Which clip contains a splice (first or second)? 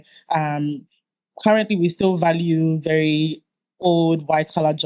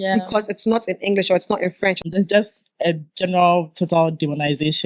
second